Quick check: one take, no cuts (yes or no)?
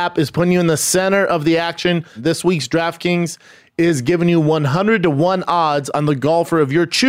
no